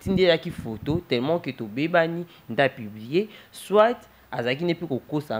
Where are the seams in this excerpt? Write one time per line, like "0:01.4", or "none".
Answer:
none